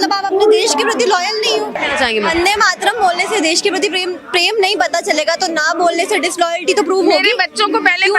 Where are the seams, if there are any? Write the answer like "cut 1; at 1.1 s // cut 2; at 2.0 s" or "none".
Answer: none